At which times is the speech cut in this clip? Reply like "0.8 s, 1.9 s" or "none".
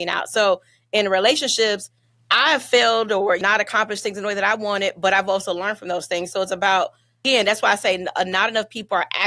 3.4 s, 7.2 s